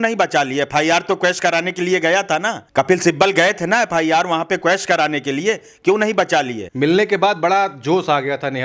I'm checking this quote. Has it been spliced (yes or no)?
no